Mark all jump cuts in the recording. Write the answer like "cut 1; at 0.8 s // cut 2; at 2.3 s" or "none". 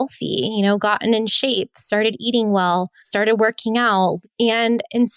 cut 1; at 3.0 s // cut 2; at 4.2 s